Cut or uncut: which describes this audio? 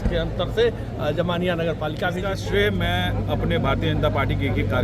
cut